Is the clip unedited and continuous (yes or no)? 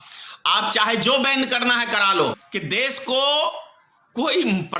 no